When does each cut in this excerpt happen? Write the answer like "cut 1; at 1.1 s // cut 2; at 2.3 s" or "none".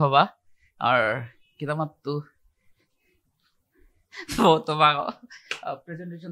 none